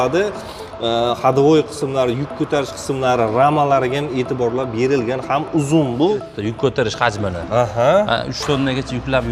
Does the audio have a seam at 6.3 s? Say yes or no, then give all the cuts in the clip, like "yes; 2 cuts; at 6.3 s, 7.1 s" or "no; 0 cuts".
yes; 1 cut; at 6.3 s